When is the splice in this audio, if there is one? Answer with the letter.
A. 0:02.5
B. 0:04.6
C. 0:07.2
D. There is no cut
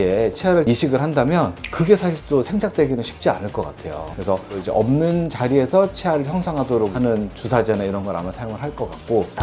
B